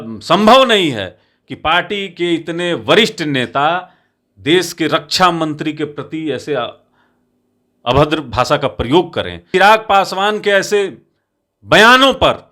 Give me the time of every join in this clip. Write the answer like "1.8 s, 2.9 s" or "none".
9.5 s